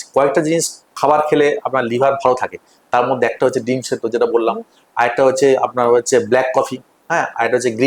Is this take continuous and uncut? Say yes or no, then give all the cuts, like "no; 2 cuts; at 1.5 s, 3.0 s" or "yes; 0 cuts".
yes; 0 cuts